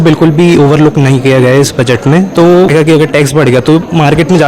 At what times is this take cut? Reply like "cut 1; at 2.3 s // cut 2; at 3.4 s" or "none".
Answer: cut 1; at 2.7 s